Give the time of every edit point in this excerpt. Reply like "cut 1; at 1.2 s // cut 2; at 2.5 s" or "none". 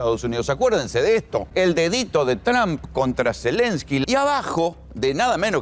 cut 1; at 1.5 s // cut 2; at 4.0 s